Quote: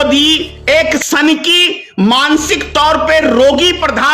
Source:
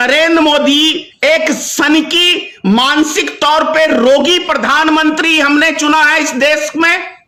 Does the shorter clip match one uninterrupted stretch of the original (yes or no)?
no